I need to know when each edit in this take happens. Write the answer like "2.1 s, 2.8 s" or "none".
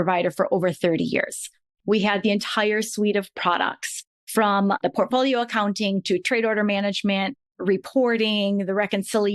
1.6 s